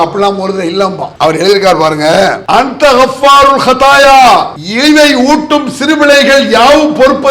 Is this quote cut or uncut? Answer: cut